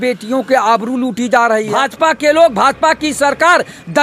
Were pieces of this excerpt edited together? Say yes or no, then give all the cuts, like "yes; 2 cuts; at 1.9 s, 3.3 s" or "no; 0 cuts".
yes; 1 cut; at 1.7 s